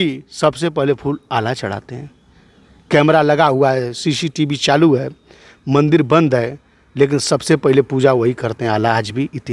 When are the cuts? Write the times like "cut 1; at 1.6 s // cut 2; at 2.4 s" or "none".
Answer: none